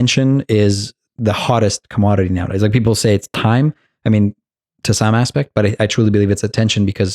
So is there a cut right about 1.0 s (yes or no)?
yes